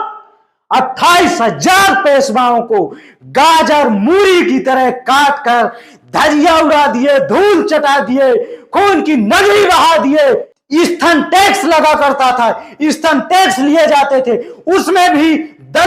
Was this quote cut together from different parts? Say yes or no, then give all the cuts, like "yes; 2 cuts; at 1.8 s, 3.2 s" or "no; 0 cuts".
yes; 1 cut; at 10.5 s